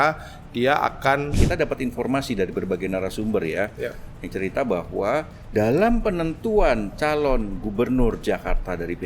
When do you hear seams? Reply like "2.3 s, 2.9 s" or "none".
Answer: 1.4 s